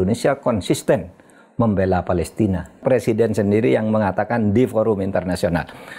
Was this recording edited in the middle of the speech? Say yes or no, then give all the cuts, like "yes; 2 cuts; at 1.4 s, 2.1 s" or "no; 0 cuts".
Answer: yes; 1 cut; at 2.8 s